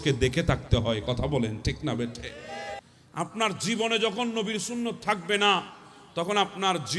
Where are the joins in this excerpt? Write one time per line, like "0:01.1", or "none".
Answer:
0:02.8